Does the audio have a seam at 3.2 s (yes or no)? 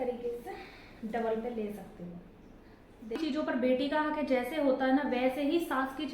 yes